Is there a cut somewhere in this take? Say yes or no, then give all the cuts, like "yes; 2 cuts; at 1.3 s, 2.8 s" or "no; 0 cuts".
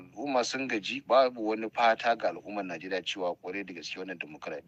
no; 0 cuts